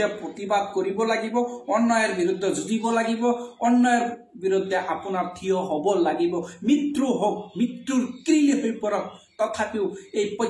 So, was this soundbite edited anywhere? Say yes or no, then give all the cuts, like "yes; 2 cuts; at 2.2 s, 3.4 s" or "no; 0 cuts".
no; 0 cuts